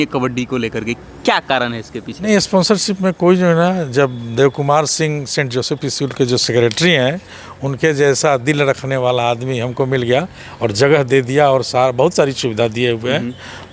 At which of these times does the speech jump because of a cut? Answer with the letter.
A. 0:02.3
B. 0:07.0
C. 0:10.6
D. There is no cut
A